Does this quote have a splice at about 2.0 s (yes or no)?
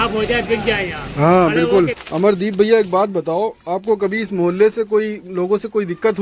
yes